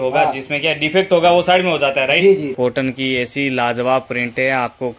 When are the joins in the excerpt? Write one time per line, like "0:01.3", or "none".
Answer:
0:02.5